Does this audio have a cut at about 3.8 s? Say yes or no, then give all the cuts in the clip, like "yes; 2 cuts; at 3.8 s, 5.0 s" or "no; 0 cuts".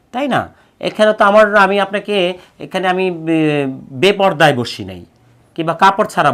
no; 0 cuts